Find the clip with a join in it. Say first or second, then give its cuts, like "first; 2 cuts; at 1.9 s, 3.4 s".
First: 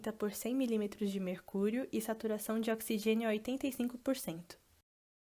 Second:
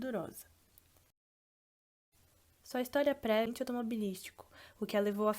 second; 1 cut; at 3.5 s